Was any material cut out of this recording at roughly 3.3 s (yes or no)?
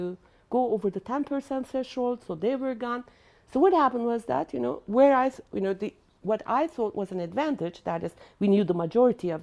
no